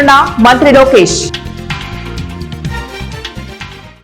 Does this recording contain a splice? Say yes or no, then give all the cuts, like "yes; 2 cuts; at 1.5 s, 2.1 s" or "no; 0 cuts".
yes; 1 cut; at 1.3 s